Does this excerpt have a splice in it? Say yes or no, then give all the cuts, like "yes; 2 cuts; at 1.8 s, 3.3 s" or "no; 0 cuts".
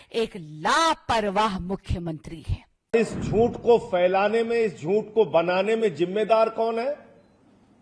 yes; 1 cut; at 2.9 s